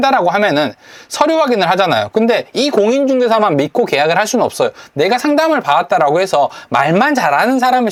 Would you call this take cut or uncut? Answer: uncut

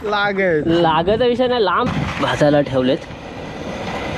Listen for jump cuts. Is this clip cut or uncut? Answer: cut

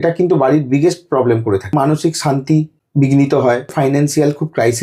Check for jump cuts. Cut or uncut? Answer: cut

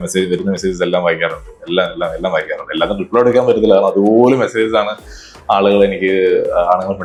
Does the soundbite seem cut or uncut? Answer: uncut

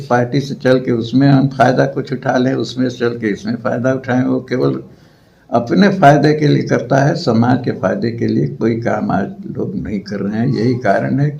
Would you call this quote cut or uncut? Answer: uncut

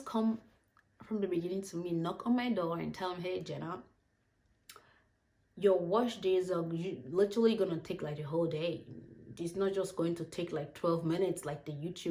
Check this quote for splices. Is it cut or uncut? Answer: uncut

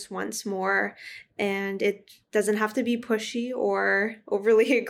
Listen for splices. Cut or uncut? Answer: uncut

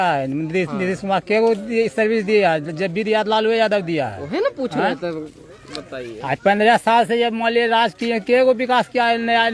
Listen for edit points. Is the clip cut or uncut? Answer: uncut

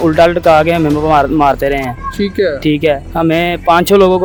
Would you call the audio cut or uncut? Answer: uncut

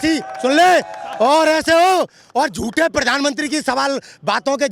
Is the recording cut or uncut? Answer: uncut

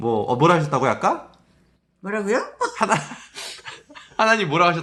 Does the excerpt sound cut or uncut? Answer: uncut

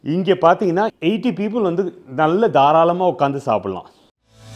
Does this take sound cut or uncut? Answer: cut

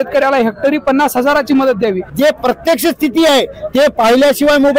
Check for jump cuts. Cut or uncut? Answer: cut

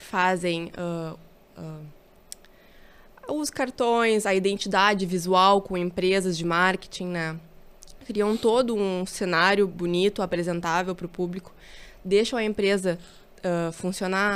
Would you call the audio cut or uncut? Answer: uncut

